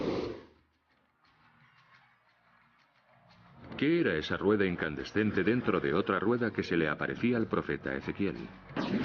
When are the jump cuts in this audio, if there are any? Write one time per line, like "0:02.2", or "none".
0:05.0